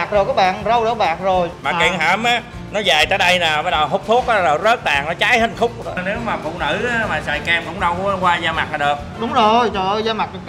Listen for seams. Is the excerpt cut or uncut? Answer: cut